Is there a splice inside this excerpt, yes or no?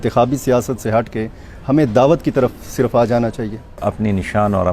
yes